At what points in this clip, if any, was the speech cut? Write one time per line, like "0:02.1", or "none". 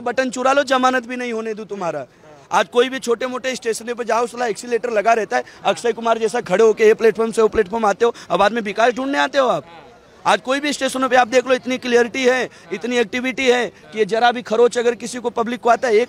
none